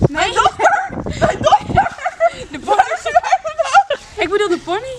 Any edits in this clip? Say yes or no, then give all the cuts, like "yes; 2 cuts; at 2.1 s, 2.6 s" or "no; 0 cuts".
yes; 1 cut; at 4.0 s